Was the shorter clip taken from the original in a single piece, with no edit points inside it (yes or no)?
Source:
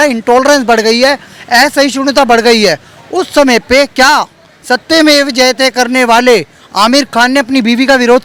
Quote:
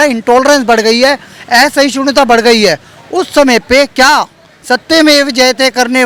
yes